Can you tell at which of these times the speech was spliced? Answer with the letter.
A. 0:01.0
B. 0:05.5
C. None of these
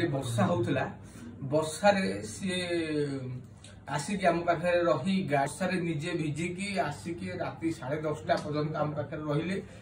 B